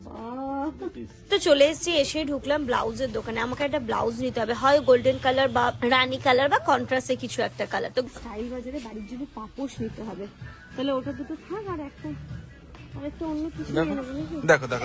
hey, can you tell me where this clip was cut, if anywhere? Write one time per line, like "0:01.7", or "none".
0:01.3
0:08.1